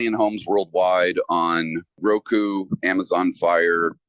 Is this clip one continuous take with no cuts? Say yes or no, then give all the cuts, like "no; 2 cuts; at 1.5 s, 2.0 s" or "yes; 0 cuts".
no; 1 cut; at 2.0 s